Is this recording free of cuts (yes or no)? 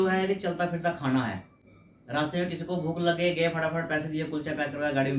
yes